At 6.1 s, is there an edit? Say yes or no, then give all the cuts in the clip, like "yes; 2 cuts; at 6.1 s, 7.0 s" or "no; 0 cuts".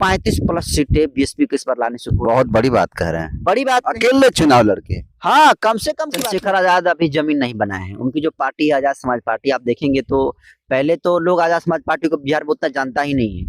yes; 1 cut; at 6.1 s